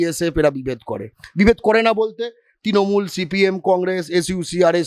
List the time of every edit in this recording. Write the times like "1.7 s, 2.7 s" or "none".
none